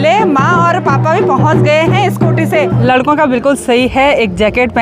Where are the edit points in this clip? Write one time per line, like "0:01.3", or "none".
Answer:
0:02.8